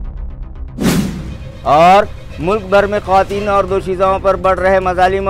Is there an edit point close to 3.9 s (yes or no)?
no